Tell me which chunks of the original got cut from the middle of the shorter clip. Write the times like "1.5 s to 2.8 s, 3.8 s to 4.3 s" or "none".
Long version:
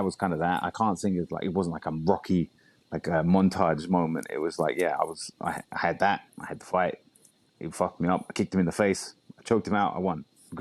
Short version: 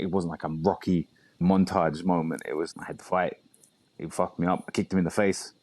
2.8 s to 3.2 s, 4.5 s to 6.3 s